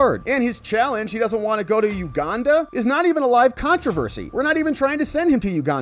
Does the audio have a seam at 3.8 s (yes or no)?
no